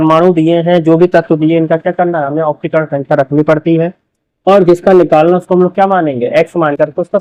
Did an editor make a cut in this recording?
no; 0 cuts

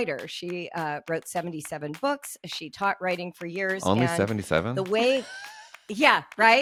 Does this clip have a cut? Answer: no; 0 cuts

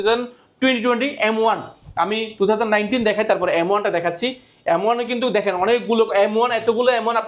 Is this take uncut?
yes; 0 cuts

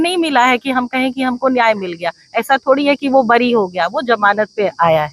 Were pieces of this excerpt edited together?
no; 0 cuts

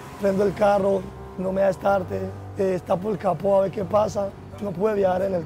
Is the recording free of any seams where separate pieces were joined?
yes; 0 cuts

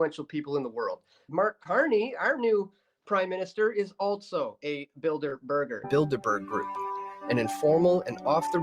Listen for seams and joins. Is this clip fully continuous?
no; 2 cuts; at 1.3 s, 5.8 s

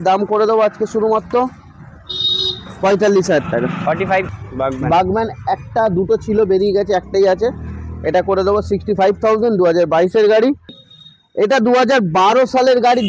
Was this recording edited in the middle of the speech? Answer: yes; 2 cuts; at 4.3 s, 10.7 s

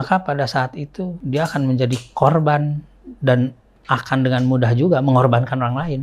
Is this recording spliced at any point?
yes; 1 cut; at 1.2 s

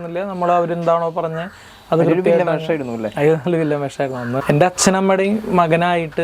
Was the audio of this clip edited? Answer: yes; 1 cut; at 4.4 s

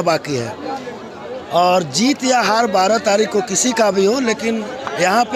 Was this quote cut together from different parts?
no; 0 cuts

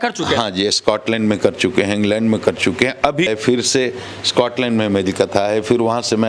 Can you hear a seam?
no; 0 cuts

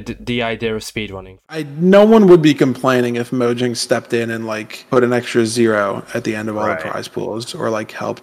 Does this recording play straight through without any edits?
no; 1 cut; at 1.7 s

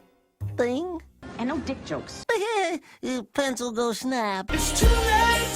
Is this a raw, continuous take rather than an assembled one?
no; 2 cuts; at 2.1 s, 4.4 s

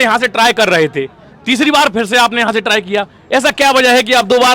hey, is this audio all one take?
yes; 0 cuts

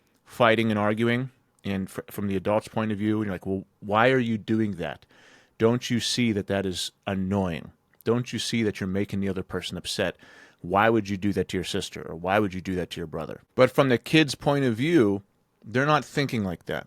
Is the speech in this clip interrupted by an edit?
no; 0 cuts

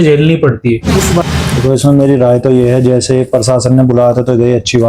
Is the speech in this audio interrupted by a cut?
yes; 1 cut; at 1.2 s

